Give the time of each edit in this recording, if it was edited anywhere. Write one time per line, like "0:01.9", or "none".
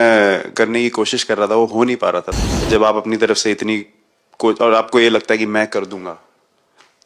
0:02.4